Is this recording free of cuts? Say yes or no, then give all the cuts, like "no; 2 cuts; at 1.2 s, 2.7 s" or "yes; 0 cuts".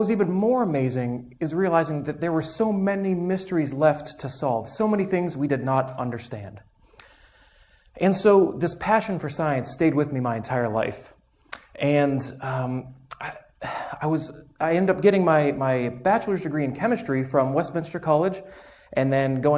no; 1 cut; at 17.9 s